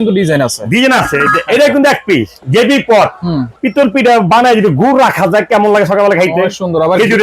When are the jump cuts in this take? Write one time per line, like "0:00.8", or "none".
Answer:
0:02.4
0:03.6